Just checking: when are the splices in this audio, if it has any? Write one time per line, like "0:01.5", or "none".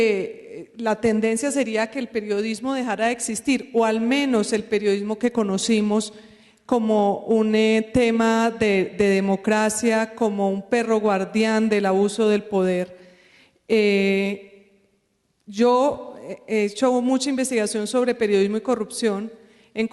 0:06.8